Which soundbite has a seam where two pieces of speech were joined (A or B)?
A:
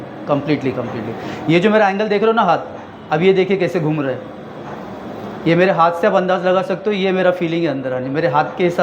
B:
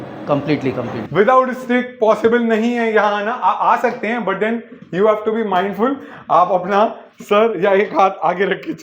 B